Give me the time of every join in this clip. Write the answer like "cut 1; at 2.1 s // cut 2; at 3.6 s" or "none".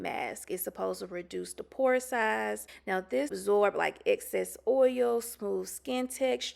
cut 1; at 3.1 s